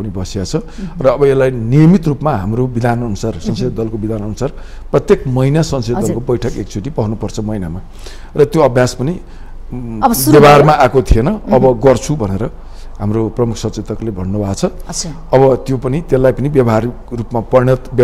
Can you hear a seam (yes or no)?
no